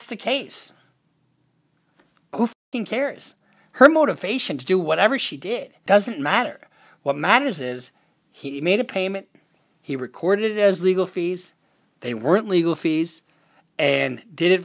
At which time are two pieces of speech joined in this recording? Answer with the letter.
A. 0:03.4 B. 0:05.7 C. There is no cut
B